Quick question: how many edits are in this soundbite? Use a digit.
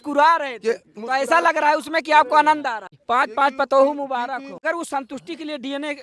2